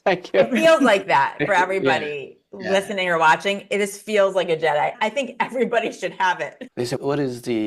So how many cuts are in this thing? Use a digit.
2